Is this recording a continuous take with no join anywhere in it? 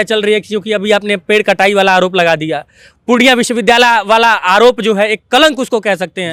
yes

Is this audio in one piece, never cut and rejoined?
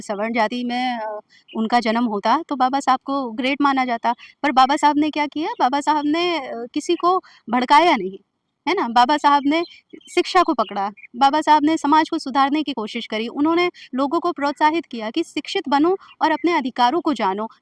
yes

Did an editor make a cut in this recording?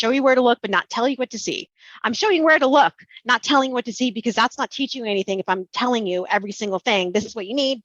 no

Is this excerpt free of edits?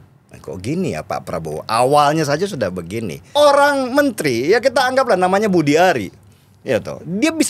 no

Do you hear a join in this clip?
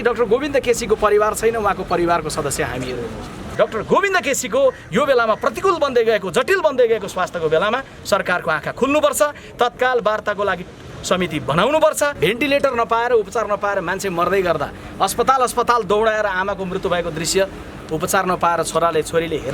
yes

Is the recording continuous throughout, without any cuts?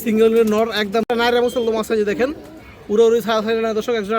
no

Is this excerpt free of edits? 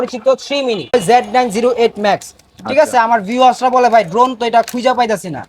no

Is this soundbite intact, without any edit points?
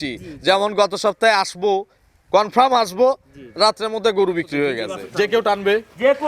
no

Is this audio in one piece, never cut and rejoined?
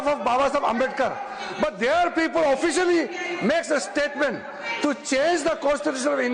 yes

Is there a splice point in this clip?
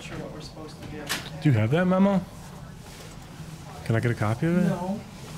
no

